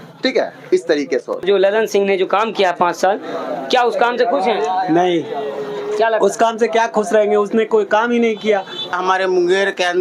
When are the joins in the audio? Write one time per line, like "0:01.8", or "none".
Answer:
0:01.4
0:08.9